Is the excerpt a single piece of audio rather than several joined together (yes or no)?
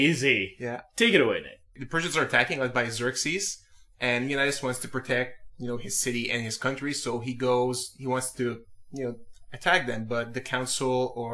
yes